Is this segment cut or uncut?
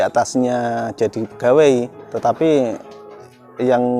cut